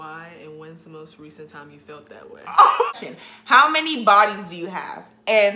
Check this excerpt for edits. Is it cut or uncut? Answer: cut